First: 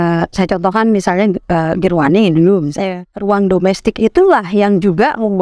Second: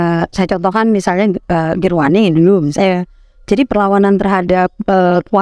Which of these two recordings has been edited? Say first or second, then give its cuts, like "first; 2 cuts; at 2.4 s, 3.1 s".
first; 1 cut; at 3.2 s